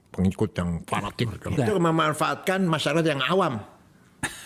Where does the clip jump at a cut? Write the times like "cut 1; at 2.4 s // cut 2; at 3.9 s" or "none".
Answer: cut 1; at 1.6 s

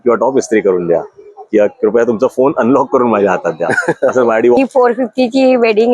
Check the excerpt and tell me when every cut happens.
cut 1; at 4.6 s

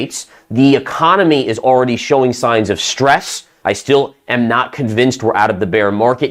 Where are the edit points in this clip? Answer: cut 1; at 3.5 s

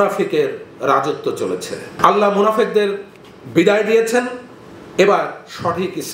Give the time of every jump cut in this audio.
cut 1; at 2.0 s

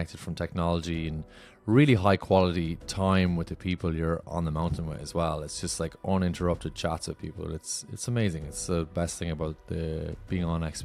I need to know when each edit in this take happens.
none

